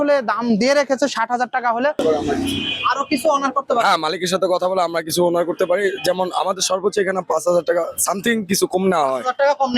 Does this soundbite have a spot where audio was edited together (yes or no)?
yes